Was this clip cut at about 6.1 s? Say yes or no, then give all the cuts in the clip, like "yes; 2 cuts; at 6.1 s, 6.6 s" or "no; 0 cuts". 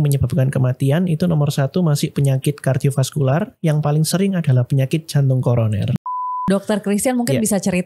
yes; 1 cut; at 6.1 s